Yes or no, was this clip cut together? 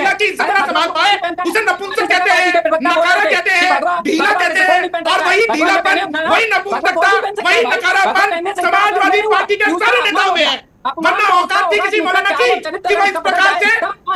no